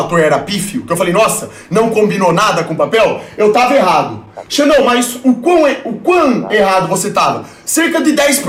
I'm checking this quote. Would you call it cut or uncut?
uncut